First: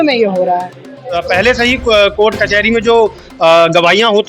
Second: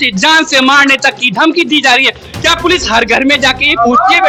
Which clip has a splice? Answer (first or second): first